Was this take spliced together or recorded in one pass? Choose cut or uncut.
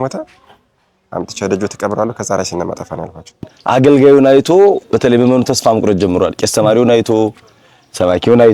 cut